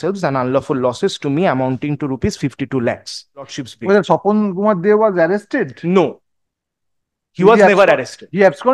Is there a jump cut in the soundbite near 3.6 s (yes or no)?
yes